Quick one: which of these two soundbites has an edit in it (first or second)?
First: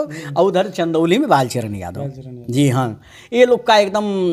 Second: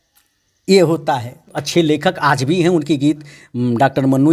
second